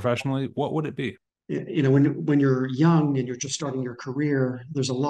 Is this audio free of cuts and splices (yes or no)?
no